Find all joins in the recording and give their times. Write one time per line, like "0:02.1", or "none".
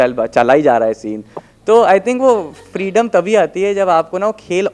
none